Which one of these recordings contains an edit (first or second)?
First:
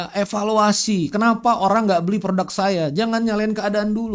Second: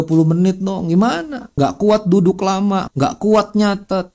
second